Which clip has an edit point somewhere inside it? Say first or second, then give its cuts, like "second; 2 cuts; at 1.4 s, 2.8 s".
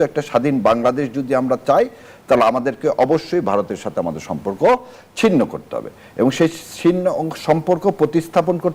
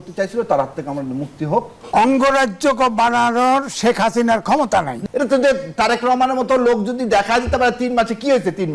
second; 2 cuts; at 1.8 s, 4.9 s